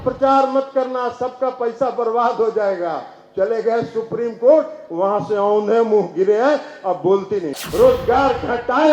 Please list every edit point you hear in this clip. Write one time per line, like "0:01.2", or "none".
0:07.6